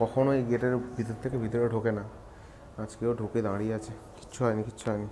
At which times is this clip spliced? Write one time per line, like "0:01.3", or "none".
none